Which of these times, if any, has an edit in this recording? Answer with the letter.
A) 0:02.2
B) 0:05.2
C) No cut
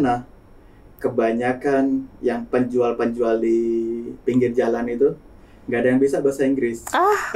C